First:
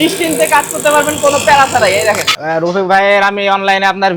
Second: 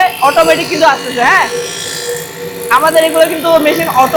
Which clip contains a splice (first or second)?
first